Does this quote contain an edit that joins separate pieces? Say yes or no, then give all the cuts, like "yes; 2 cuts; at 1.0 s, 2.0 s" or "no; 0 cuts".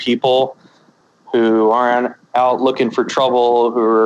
yes; 1 cut; at 1.0 s